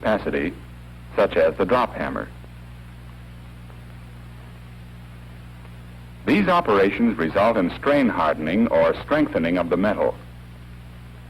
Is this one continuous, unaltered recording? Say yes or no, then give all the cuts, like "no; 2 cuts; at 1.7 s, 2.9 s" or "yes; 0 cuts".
no; 1 cut; at 4.9 s